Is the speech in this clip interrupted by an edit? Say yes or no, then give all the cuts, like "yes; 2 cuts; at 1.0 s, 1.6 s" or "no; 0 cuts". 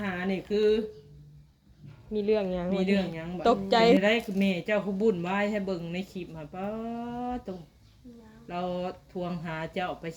yes; 1 cut; at 4.0 s